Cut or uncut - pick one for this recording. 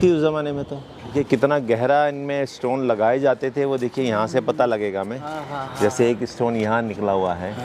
cut